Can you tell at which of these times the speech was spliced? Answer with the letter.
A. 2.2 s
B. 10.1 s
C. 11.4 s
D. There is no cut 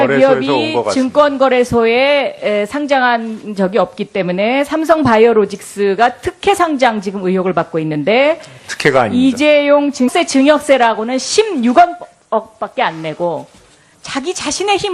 D